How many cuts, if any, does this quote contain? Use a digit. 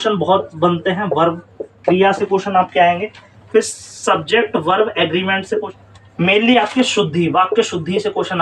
1